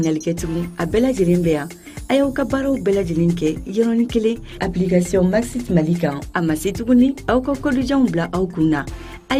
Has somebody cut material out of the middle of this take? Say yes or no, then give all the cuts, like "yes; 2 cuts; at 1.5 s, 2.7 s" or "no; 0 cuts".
no; 0 cuts